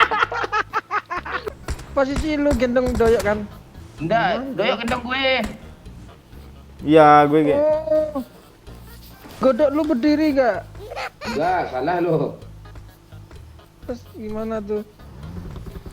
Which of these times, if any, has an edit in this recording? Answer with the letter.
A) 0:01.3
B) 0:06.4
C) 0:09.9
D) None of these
A